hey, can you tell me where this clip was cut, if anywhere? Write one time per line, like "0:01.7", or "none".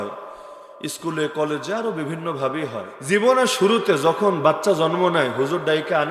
0:02.9